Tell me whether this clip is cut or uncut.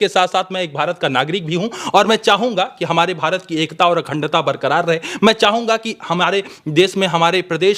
uncut